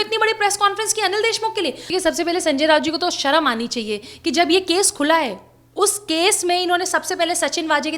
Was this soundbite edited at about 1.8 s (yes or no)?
yes